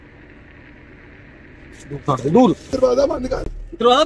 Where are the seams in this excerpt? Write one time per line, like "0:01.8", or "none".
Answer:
0:02.7